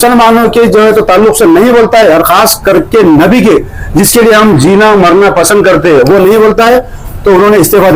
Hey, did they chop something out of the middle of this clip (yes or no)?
no